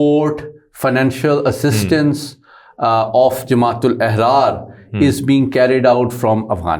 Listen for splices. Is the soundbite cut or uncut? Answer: uncut